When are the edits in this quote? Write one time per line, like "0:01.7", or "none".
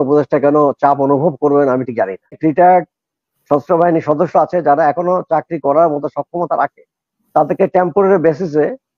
0:02.4